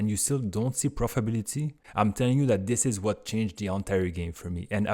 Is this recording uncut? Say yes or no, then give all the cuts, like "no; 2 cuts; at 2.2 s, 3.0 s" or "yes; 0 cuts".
no; 1 cut; at 1.8 s